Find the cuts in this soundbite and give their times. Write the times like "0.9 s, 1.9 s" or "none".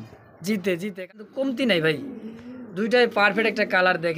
1.1 s